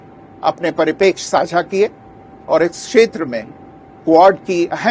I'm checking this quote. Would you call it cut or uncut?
uncut